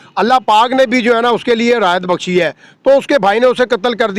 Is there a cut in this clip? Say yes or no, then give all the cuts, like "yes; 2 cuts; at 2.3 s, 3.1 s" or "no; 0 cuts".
no; 0 cuts